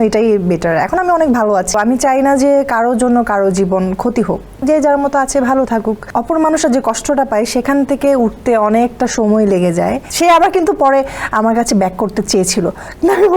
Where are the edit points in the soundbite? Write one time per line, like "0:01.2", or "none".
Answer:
0:01.7
0:04.5
0:06.0
0:10.1